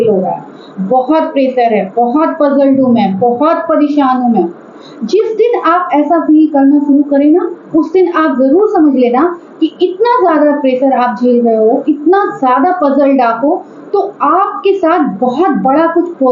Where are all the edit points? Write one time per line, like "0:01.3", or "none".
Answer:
none